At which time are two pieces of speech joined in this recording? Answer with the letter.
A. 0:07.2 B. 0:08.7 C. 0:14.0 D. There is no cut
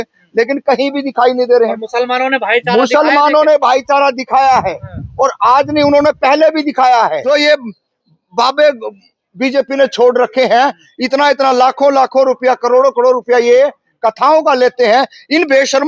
A